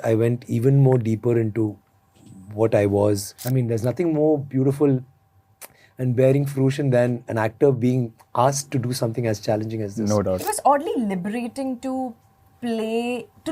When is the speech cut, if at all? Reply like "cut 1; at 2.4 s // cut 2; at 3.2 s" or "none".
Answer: cut 1; at 3.4 s // cut 2; at 10.4 s